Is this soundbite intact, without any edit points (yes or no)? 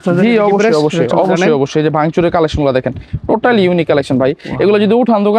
yes